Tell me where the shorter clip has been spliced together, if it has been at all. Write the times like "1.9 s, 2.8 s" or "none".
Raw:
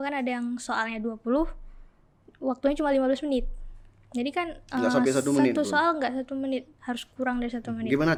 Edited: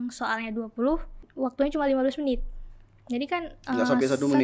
1.2 s